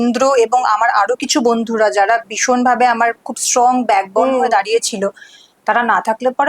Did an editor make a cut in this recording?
no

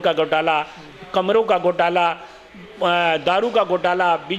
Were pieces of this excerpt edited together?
no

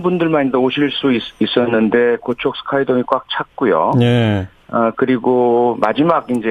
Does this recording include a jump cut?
yes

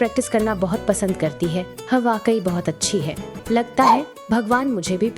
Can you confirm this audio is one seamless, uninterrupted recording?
no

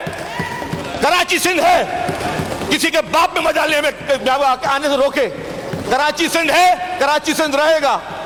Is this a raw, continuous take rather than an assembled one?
yes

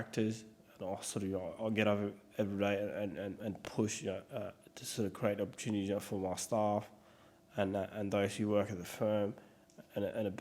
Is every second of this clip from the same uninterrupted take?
no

